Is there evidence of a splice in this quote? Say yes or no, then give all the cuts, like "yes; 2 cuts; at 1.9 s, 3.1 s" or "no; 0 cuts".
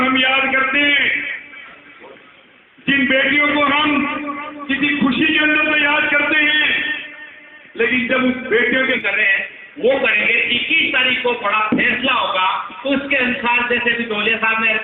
yes; 1 cut; at 9.0 s